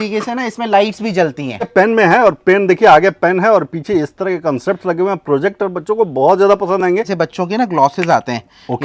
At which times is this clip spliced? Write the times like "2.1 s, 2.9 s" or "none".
1.7 s, 7.1 s